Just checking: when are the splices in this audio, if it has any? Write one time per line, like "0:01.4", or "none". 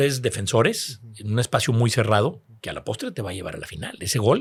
none